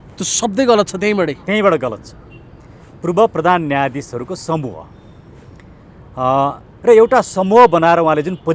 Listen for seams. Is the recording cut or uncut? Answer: uncut